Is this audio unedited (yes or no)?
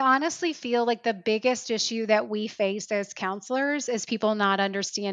yes